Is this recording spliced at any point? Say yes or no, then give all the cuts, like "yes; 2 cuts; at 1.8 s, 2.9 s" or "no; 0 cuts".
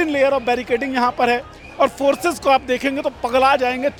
no; 0 cuts